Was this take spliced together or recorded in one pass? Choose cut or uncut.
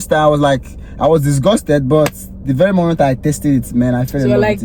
uncut